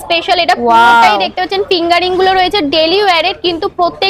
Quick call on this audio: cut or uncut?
uncut